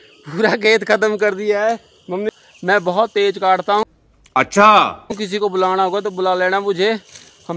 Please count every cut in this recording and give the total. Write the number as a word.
one